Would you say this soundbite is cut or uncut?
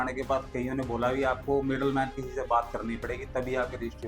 uncut